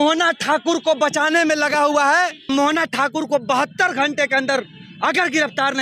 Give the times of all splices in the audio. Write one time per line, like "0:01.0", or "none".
0:02.5